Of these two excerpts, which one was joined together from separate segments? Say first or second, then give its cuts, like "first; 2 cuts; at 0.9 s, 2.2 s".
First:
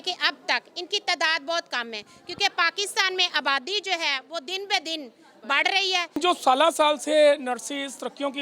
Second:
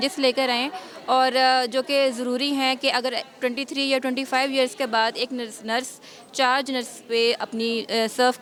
first; 1 cut; at 6.2 s